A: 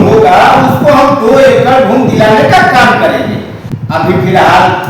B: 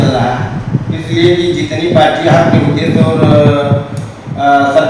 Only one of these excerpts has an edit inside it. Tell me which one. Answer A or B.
A